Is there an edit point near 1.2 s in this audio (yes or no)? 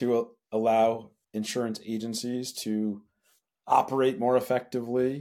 yes